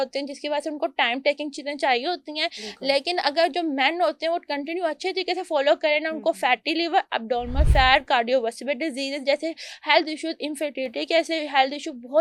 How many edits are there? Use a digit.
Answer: 0